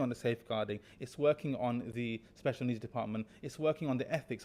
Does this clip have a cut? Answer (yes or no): no